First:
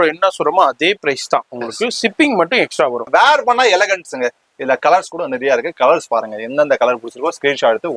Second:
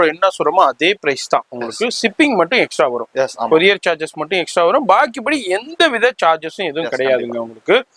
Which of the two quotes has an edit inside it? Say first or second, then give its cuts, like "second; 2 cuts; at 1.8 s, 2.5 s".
first; 1 cut; at 3.1 s